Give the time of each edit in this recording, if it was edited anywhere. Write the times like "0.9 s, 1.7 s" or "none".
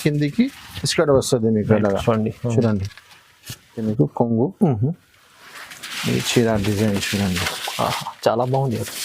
3.8 s